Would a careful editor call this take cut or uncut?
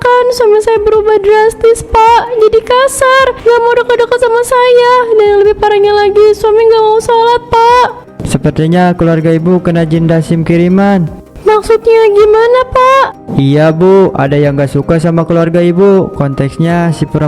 uncut